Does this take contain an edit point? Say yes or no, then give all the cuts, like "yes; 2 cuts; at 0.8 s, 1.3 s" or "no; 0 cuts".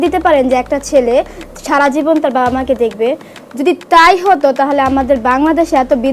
no; 0 cuts